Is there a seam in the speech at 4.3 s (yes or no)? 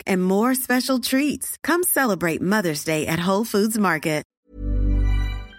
yes